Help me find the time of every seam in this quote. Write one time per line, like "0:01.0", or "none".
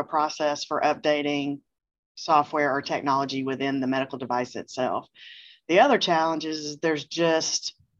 none